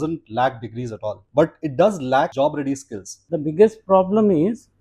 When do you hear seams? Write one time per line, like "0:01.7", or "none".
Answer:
0:01.2
0:02.3
0:03.2